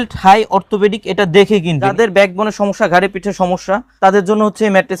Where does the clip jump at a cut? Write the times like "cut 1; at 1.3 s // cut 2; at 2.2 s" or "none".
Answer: cut 1; at 1.9 s // cut 2; at 3.9 s